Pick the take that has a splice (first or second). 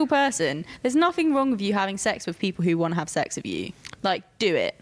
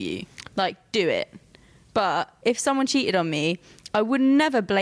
second